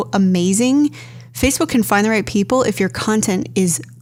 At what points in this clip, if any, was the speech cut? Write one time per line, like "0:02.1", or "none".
none